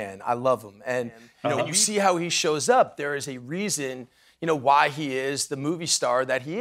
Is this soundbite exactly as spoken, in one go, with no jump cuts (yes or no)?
no